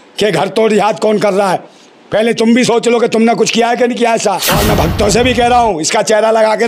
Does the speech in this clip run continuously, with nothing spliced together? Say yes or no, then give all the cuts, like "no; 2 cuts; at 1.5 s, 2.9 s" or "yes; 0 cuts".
no; 1 cut; at 4.5 s